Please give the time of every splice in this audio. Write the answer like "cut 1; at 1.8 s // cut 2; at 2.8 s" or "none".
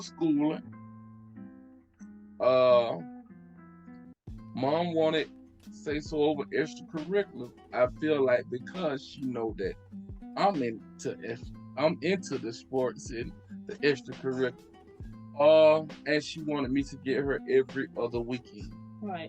none